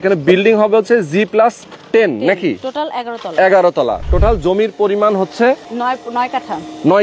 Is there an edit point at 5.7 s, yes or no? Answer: yes